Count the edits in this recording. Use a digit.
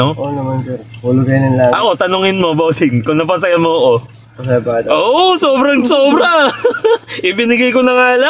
0